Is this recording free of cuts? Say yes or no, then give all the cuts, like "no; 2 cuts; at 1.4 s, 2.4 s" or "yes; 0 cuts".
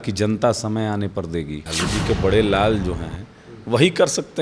no; 1 cut; at 1.6 s